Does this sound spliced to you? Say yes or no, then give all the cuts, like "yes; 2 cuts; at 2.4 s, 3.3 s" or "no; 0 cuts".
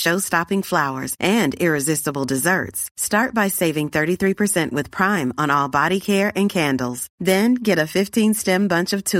no; 0 cuts